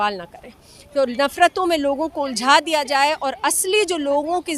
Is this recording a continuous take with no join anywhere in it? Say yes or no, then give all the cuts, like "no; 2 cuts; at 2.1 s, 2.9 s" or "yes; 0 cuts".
yes; 0 cuts